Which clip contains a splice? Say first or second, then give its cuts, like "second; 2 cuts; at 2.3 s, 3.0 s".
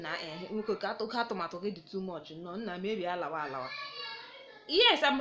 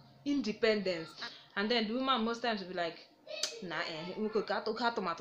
second; 1 cut; at 1.1 s